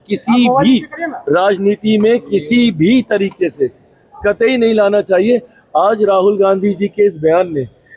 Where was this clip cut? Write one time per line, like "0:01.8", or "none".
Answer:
none